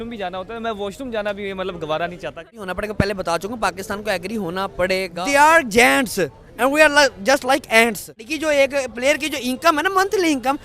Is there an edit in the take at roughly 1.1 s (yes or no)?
no